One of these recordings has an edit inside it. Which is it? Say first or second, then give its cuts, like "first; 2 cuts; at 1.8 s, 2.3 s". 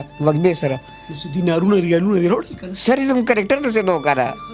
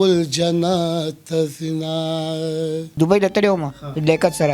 second; 1 cut; at 2.8 s